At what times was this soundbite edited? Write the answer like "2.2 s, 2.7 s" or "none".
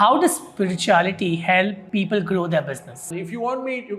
1.8 s, 3.1 s